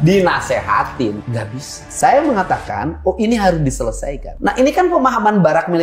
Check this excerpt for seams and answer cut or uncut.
uncut